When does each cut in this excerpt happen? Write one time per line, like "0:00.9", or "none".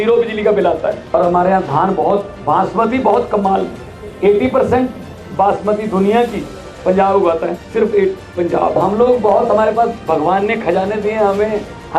0:01.0
0:08.8